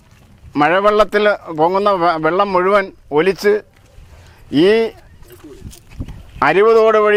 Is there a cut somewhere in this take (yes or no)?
no